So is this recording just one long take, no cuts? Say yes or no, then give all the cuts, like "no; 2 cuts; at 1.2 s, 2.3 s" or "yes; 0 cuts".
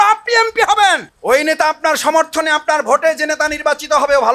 no; 1 cut; at 1.1 s